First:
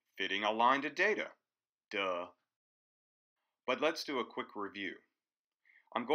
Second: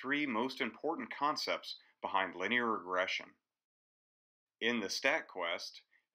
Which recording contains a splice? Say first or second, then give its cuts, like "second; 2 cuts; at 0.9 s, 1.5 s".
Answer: second; 1 cut; at 1.1 s